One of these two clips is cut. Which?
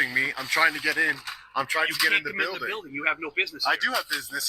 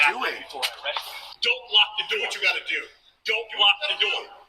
second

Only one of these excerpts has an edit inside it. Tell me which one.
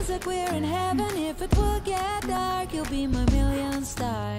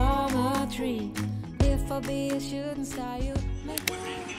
first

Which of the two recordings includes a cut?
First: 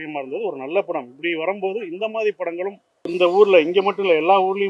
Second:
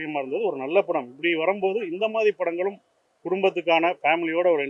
first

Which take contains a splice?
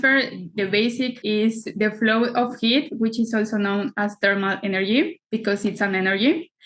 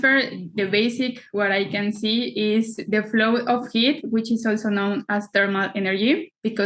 first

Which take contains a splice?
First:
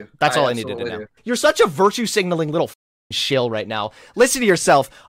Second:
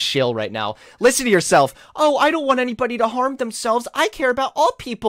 first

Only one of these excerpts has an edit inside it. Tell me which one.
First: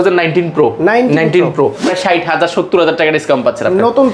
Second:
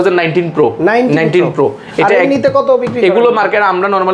first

